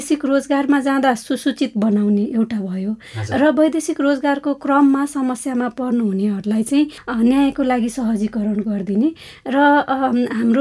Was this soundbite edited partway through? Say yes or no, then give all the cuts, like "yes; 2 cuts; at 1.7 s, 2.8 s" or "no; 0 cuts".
no; 0 cuts